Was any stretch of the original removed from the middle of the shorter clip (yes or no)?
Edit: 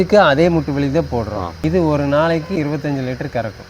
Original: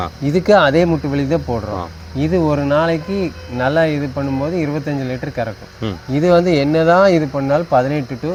yes